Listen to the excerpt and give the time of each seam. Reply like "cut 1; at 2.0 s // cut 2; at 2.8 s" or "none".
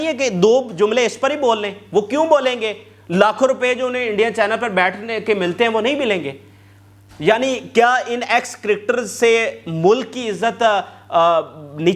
none